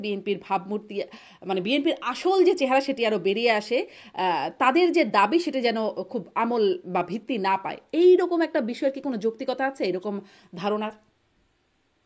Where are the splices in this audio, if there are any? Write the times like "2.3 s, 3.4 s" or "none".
none